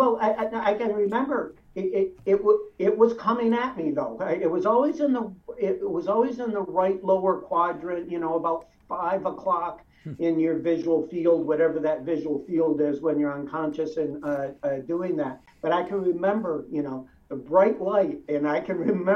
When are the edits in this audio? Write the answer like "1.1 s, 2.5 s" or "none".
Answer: 15.5 s

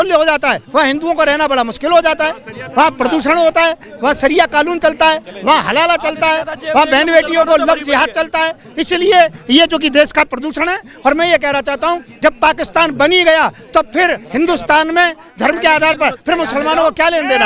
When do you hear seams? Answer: none

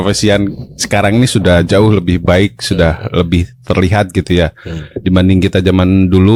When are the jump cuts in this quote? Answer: none

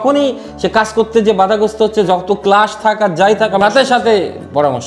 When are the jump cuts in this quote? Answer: 3.6 s

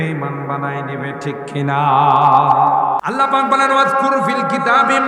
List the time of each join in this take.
3.0 s

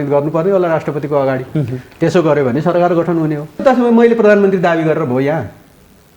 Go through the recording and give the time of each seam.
3.6 s

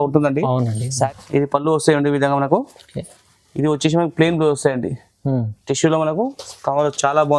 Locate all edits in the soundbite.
1.1 s

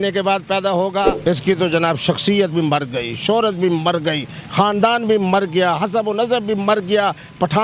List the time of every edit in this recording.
1.1 s

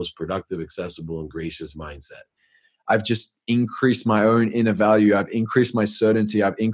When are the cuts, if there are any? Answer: 2.3 s

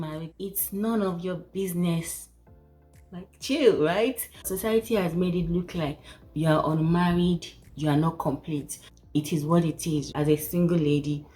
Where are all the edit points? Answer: 4.4 s, 8.8 s, 10.1 s

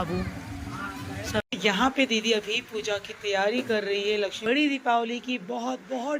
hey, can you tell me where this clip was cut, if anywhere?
1.4 s, 4.4 s

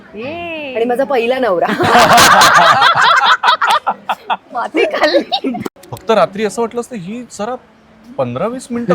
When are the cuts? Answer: 5.6 s

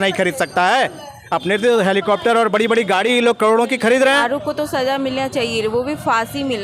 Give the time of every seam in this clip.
4.2 s

